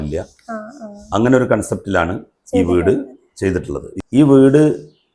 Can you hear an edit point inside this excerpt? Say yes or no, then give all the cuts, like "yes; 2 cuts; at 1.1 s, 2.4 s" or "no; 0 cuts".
yes; 1 cut; at 3.9 s